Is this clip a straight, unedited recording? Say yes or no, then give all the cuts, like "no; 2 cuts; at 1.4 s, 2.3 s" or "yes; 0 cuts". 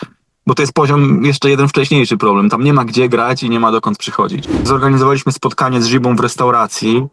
no; 1 cut; at 4.6 s